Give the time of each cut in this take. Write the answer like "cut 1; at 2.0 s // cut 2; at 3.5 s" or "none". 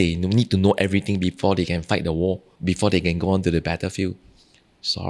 cut 1; at 2.5 s